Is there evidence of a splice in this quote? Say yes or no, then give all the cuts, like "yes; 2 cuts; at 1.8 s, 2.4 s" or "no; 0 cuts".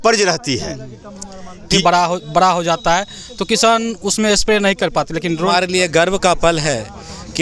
yes; 2 cuts; at 1.7 s, 5.4 s